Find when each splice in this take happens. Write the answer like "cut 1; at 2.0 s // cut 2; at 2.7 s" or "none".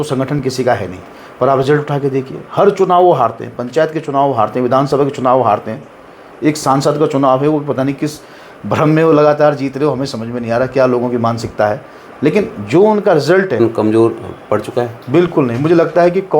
cut 1; at 13.5 s